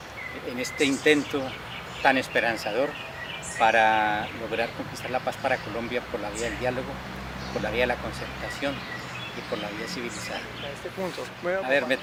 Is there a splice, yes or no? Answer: no